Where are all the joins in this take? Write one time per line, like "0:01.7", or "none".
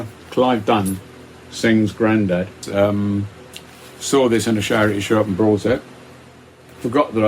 0:02.6